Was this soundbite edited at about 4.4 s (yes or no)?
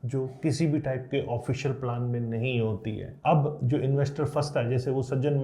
no